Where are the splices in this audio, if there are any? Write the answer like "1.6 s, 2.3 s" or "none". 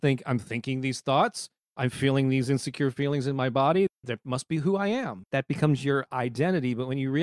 none